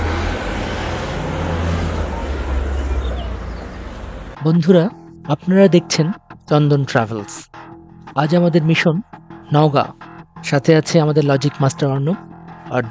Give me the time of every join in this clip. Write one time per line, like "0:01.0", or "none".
0:04.3

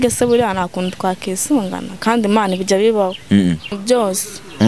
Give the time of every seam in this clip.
0:03.7

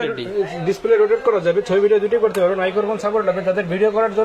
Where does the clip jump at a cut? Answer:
none

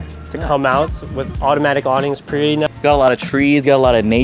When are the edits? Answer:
none

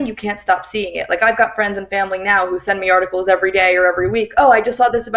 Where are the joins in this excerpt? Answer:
none

